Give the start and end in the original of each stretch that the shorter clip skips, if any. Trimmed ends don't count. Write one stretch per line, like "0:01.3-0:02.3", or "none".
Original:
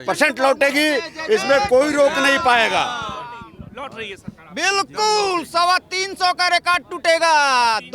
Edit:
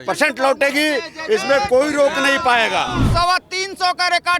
0:03.0-0:05.4